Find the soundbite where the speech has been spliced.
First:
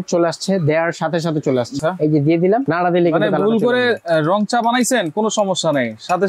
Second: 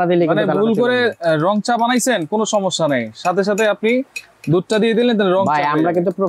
first; 1 cut; at 1.8 s

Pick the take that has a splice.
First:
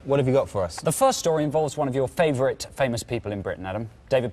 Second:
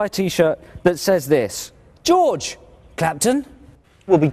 first; 1 cut; at 1.2 s

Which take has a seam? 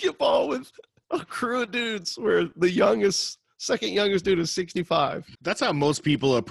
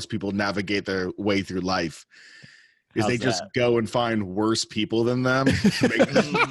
first; 1 cut; at 5.3 s

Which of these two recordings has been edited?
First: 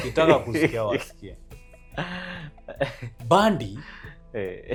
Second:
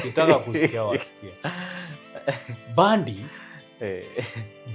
second; 1 cut; at 1.2 s

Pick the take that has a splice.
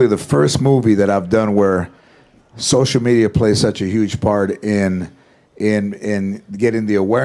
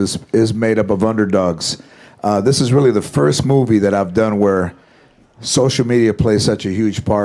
second; 1 cut; at 1.9 s

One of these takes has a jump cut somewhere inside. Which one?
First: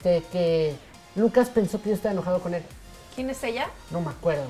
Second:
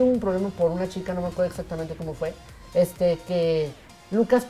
first; 1 cut; at 3.1 s

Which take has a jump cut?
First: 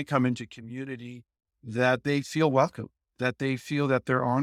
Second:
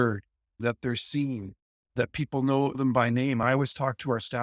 second; 1 cut; at 3.4 s

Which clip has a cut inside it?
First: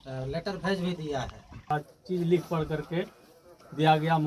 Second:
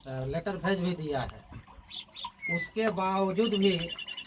first; 1 cut; at 1.7 s

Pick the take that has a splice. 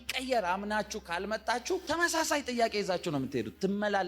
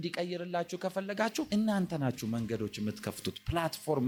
first; 1 cut; at 1.8 s

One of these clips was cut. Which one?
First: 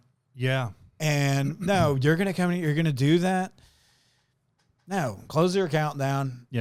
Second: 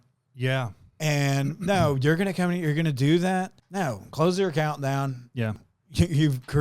second; 2 cuts; at 3.6 s, 5.6 s

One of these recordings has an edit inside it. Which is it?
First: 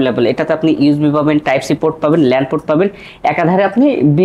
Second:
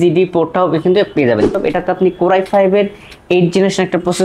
second; 1 cut; at 1.5 s

